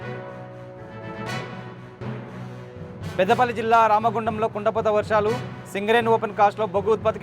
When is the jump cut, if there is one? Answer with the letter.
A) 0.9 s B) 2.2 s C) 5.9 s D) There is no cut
B